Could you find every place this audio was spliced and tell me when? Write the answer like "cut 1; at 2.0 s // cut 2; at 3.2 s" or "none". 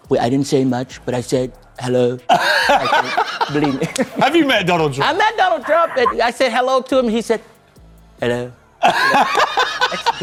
none